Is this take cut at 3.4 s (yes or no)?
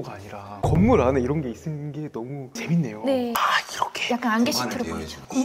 yes